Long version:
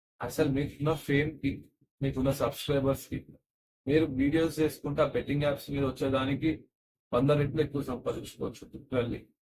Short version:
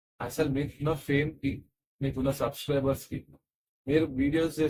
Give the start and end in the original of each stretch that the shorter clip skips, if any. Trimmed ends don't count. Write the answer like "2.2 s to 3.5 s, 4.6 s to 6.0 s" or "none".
none